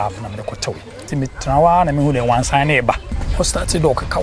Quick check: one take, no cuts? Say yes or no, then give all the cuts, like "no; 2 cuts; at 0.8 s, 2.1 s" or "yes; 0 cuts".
no; 2 cuts; at 1.0 s, 3.2 s